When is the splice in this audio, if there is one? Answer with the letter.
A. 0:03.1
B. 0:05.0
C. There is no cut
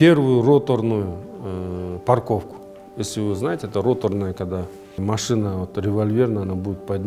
B